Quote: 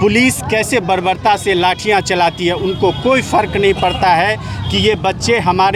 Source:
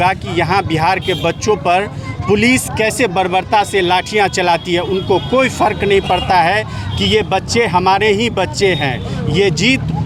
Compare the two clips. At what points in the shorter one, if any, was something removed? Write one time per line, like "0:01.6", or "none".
none